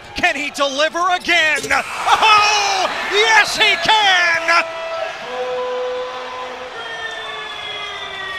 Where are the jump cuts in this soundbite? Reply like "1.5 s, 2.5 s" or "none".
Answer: none